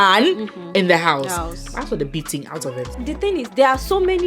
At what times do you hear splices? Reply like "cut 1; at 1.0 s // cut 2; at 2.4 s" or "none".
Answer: cut 1; at 2.9 s